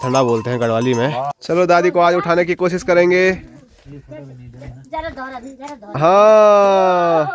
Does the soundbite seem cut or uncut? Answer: cut